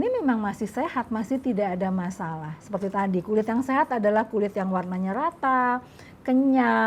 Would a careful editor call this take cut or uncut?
uncut